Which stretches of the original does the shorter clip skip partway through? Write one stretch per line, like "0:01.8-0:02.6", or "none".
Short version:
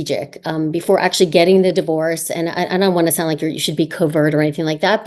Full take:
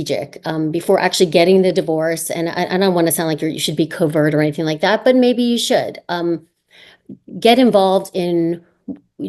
none